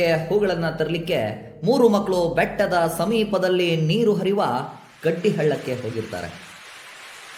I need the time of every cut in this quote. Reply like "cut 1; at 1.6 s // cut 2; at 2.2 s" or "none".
none